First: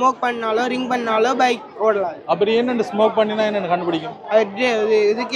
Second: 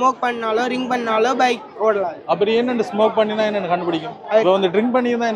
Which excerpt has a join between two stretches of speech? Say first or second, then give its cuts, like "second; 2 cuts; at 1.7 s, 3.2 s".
second; 1 cut; at 4.4 s